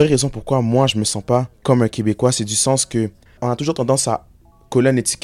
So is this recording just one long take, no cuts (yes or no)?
no